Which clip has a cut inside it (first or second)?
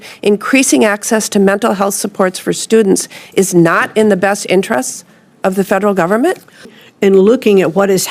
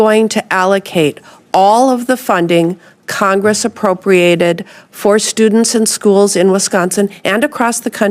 first